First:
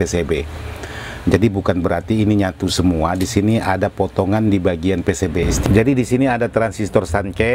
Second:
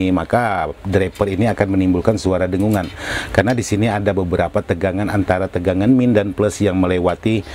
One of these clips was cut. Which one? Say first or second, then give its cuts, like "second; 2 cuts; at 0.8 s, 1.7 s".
first; 1 cut; at 5.4 s